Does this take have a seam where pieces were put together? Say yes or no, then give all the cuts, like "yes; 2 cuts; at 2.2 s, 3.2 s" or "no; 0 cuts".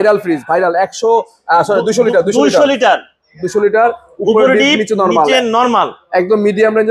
no; 0 cuts